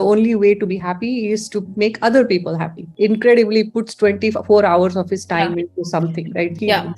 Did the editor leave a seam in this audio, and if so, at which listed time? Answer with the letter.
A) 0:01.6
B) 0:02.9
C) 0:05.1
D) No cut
B